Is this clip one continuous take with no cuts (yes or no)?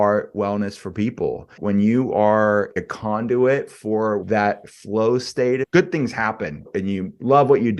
no